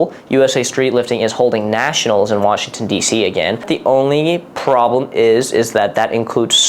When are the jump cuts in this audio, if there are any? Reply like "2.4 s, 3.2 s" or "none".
3.7 s